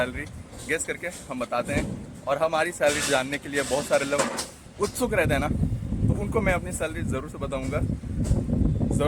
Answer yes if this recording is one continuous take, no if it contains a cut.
yes